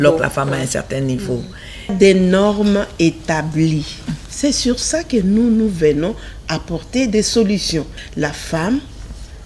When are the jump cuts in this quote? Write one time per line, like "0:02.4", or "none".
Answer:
0:01.9
0:08.0